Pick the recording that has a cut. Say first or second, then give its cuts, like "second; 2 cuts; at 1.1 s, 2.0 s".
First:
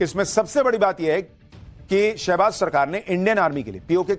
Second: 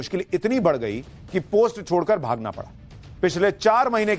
second; 1 cut; at 2.1 s